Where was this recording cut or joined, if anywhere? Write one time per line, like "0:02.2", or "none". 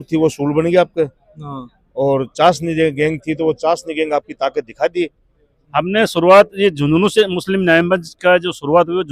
0:05.6

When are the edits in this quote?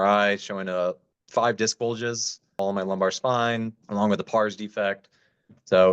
0:02.6
0:03.8

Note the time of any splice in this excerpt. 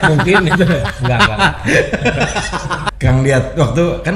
0:02.8

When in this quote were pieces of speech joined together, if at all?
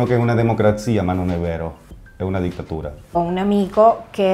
0:03.1

